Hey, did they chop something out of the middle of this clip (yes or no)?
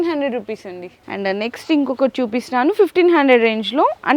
no